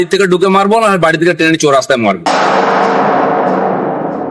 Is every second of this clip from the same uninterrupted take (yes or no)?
no